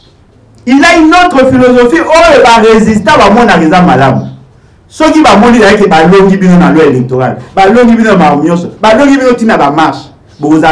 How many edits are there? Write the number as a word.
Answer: zero